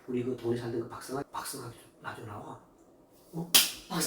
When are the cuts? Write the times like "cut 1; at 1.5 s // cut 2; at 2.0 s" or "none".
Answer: cut 1; at 1.2 s